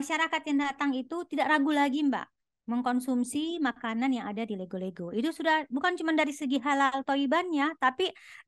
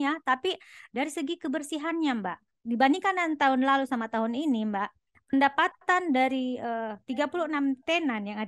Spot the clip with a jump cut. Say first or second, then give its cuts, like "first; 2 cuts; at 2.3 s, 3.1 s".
second; 1 cut; at 2.5 s